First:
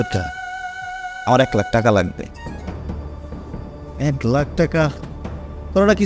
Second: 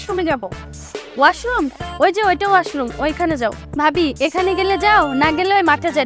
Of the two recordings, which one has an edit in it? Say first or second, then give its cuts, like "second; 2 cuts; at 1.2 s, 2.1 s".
second; 1 cut; at 3.6 s